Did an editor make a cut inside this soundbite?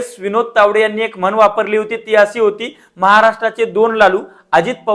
no; 0 cuts

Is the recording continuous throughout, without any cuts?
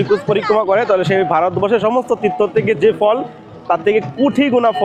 yes; 0 cuts

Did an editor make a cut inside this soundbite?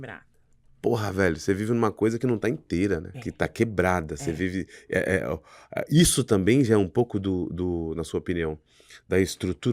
yes; 1 cut; at 3.2 s

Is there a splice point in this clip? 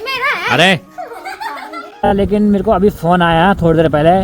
yes; 1 cut; at 2.1 s

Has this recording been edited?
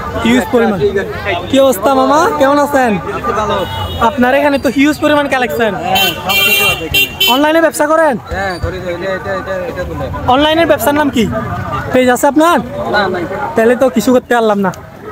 no; 0 cuts

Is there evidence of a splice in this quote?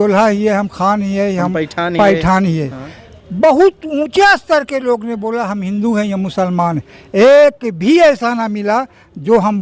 no; 0 cuts

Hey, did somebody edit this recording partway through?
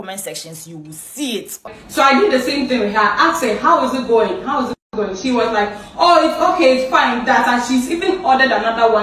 yes; 1 cut; at 1.7 s

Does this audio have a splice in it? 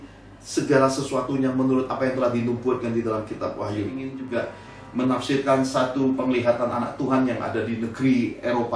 yes; 1 cut; at 4.3 s

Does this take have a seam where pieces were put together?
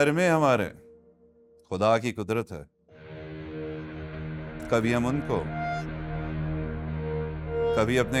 no; 0 cuts

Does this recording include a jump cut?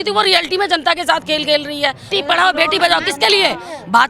yes; 1 cut; at 2.1 s

